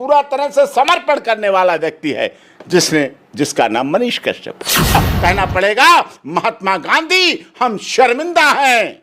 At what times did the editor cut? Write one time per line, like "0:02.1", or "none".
0:04.9

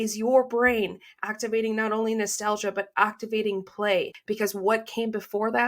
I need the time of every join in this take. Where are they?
0:04.2

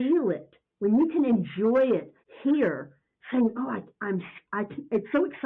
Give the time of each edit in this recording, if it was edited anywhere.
none

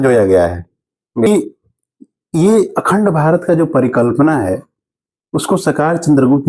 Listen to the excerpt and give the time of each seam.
0:01.3

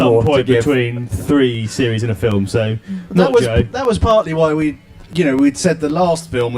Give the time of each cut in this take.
0:02.6

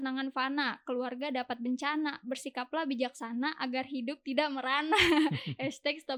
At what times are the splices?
none

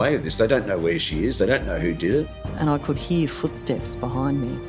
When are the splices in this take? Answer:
0:02.4

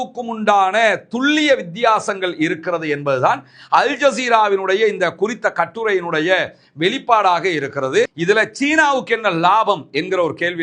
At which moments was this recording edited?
0:08.2

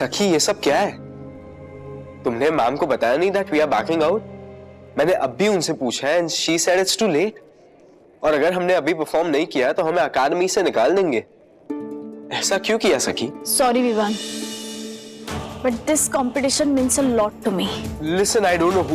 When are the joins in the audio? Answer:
none

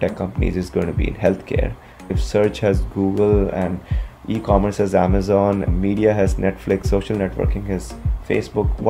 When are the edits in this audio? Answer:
none

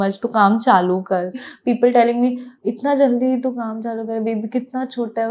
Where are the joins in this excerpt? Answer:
0:01.5

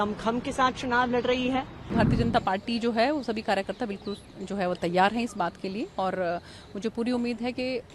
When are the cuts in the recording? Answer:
0:01.9

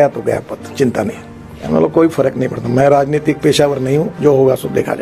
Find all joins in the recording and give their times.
0:01.5

